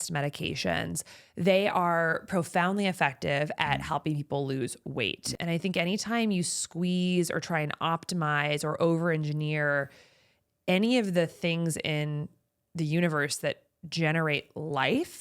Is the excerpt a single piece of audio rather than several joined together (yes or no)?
no